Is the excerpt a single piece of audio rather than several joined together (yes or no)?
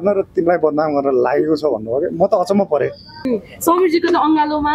no